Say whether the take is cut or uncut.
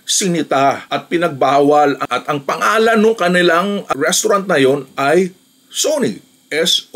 cut